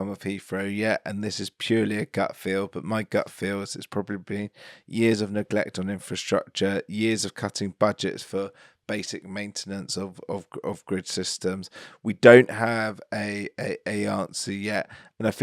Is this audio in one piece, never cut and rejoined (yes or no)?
yes